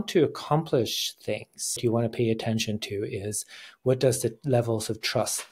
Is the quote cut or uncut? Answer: cut